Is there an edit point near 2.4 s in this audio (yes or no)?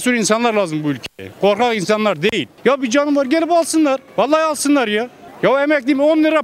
yes